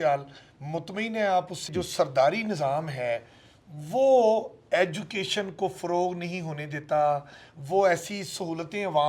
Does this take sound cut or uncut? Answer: cut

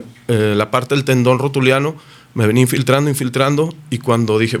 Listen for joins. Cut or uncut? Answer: uncut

